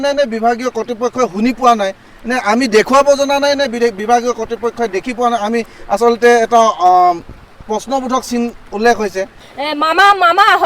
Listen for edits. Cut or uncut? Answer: cut